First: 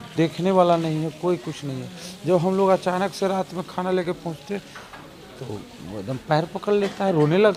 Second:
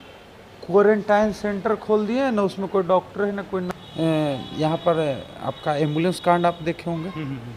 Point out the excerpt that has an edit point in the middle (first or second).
second